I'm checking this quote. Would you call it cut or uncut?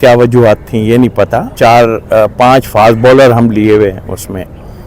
cut